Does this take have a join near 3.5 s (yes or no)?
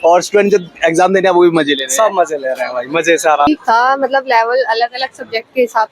yes